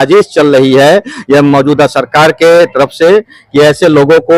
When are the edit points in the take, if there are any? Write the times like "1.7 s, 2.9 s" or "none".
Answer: none